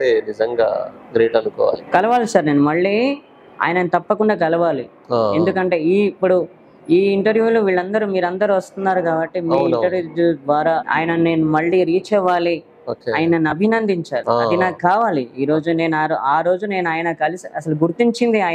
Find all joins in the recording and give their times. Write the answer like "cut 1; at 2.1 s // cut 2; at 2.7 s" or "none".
none